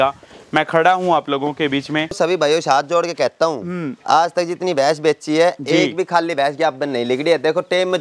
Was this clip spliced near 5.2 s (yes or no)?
no